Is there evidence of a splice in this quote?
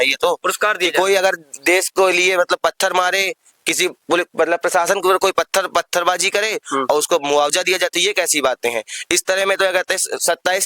no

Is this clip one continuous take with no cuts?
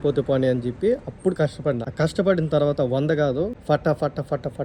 no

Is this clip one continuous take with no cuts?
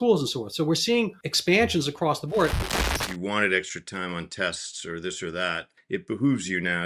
no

